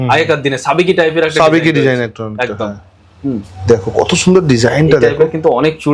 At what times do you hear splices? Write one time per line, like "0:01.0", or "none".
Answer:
none